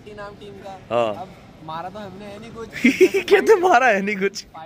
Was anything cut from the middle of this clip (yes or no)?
no